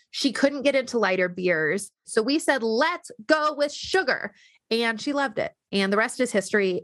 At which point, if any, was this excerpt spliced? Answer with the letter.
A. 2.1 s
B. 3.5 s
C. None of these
A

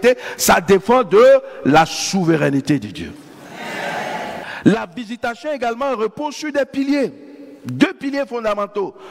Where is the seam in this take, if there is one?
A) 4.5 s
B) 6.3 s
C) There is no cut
A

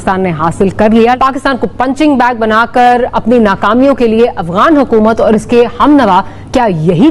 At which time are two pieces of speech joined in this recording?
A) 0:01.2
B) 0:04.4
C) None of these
A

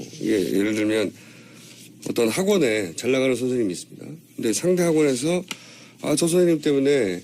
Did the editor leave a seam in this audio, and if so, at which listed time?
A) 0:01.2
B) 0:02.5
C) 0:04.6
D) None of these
C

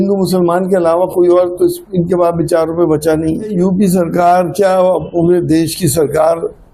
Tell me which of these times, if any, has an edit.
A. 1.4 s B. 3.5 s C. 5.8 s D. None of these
B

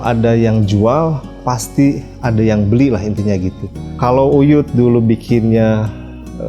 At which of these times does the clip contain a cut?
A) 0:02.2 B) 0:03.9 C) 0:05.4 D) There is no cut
B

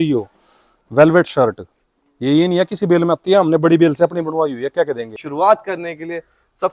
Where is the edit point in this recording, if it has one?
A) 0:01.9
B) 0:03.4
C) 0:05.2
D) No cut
C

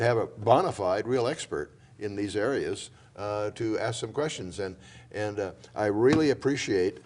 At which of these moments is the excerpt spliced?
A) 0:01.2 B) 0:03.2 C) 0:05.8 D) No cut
C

